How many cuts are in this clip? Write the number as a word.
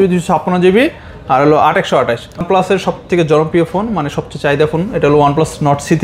one